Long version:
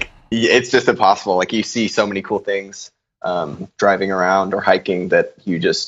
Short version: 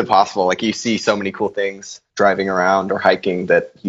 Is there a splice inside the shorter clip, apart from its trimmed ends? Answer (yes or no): yes